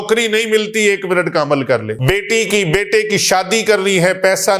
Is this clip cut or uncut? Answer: cut